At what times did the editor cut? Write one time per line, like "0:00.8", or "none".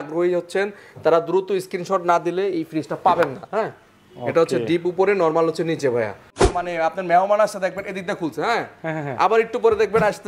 0:06.5